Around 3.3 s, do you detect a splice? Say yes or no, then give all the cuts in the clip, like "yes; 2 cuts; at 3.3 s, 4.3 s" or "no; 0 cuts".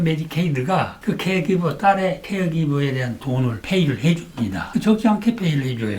no; 1 cut; at 4.6 s